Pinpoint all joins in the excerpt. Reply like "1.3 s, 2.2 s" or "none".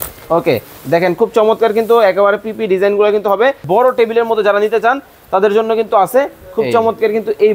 3.6 s